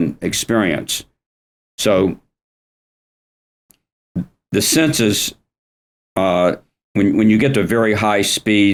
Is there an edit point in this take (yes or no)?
no